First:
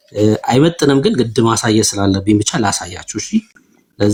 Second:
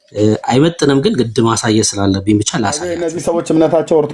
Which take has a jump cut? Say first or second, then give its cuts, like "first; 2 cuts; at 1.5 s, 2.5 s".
second; 1 cut; at 3.0 s